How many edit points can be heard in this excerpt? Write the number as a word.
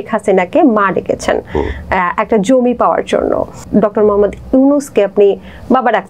one